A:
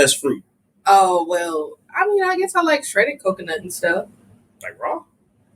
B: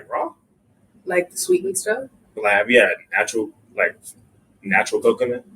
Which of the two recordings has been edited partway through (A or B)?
B